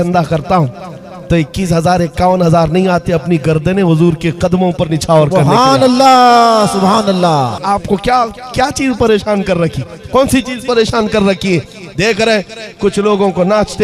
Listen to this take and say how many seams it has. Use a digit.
1